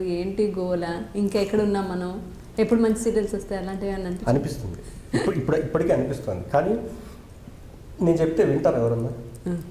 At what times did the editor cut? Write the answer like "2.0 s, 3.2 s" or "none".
none